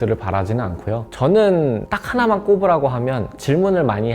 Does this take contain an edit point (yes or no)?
no